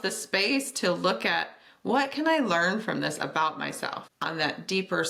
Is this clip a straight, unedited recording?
yes; 0 cuts

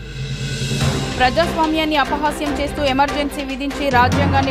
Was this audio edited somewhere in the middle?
yes; 1 cut; at 1.0 s

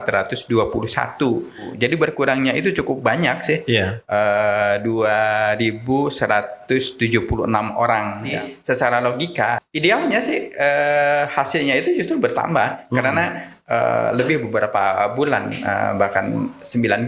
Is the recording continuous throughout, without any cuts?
no; 3 cuts; at 1.7 s, 8.3 s, 9.6 s

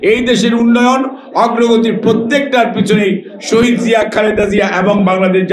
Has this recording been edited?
no; 0 cuts

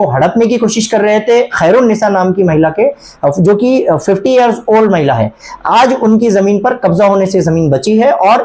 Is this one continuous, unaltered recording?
yes; 0 cuts

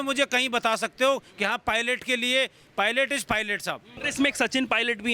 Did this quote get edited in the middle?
yes; 1 cut; at 4.0 s

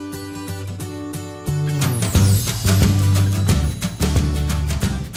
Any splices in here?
no; 0 cuts

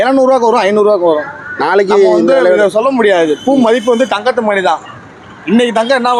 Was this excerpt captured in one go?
yes; 0 cuts

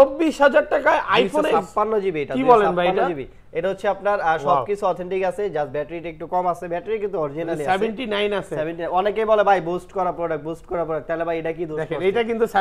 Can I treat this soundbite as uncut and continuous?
yes; 0 cuts

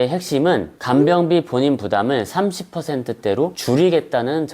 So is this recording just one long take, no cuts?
no; 1 cut; at 3.6 s

